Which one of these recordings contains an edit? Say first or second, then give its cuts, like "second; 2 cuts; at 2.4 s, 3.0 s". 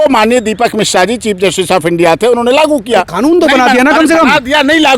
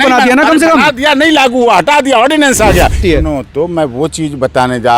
second; 1 cut; at 3.0 s